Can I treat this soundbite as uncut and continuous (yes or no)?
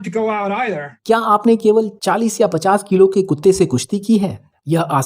no